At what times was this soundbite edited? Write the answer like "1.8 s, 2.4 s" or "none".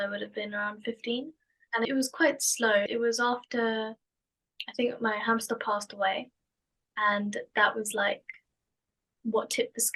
none